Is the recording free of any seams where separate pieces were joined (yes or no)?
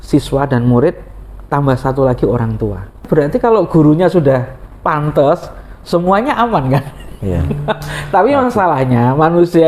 no